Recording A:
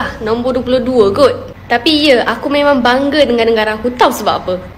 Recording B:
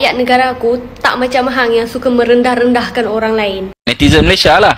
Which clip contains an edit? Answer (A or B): B